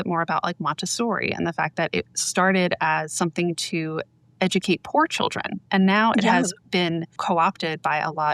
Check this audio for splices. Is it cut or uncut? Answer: cut